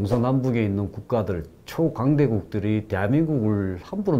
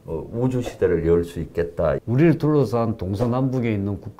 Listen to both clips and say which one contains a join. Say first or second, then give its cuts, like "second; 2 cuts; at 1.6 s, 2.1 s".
second; 1 cut; at 2.0 s